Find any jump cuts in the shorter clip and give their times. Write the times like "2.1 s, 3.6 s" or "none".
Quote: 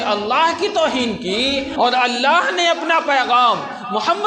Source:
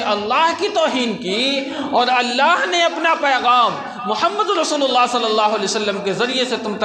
1.7 s